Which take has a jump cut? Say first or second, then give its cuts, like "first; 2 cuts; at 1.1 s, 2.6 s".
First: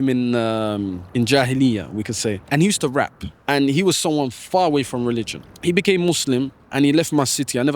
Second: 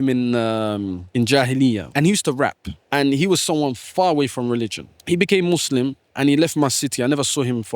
second; 1 cut; at 1.9 s